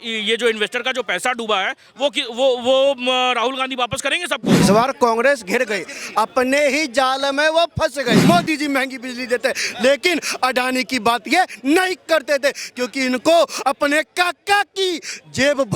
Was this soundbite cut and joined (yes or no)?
yes